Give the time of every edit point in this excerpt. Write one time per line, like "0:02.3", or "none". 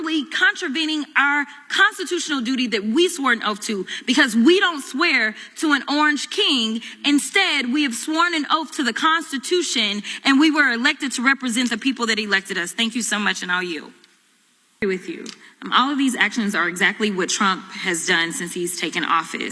0:14.8